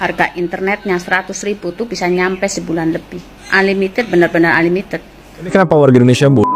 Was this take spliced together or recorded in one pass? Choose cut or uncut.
cut